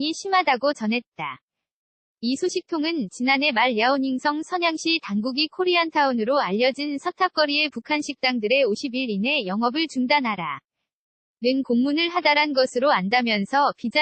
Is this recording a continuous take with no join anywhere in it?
yes; 0 cuts

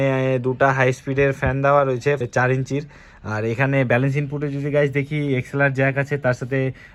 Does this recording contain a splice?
no; 0 cuts

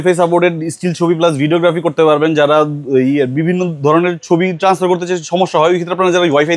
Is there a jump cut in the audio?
no; 0 cuts

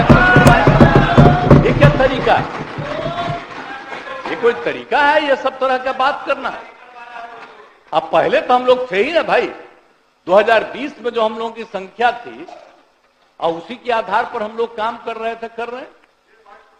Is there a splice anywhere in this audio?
no; 0 cuts

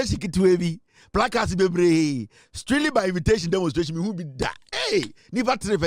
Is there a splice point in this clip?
no; 0 cuts

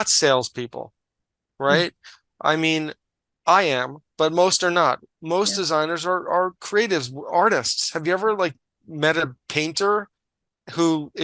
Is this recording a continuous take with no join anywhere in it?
yes; 0 cuts

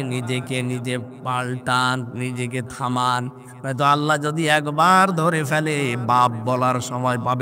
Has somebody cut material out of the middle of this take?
no; 0 cuts

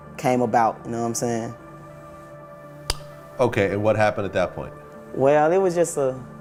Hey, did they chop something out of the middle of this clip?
no; 0 cuts

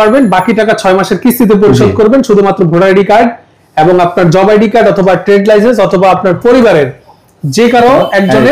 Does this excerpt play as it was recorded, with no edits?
yes; 0 cuts

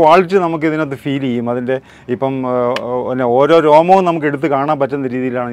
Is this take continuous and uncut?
yes; 0 cuts

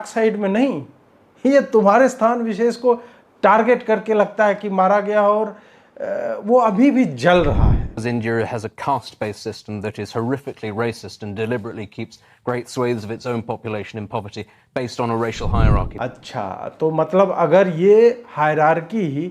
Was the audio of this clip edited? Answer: yes; 2 cuts; at 8.0 s, 15.9 s

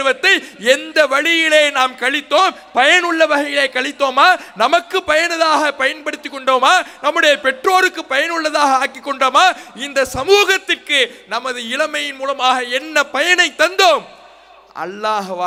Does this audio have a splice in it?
no; 0 cuts

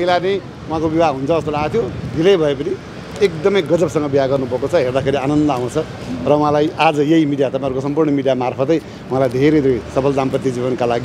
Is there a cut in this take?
no; 0 cuts

